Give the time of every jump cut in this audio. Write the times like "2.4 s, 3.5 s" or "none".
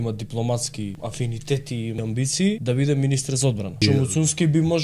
1.0 s, 2.1 s, 3.8 s